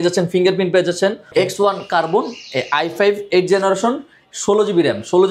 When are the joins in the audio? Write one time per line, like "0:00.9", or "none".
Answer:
0:01.2